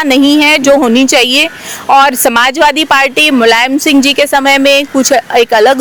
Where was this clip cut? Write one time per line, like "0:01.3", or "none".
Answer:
none